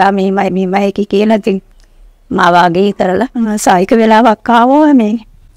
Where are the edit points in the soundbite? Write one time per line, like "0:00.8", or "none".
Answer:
0:03.5